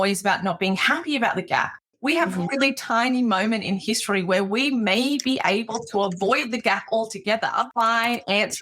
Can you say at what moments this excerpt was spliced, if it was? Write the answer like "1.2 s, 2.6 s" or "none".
1.8 s, 7.7 s